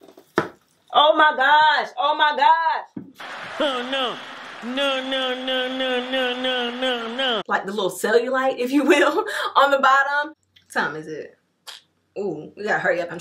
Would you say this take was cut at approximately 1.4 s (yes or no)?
no